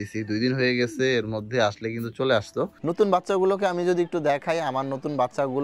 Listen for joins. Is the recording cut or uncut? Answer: cut